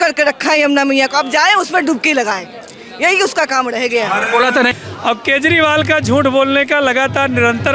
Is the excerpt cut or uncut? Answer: cut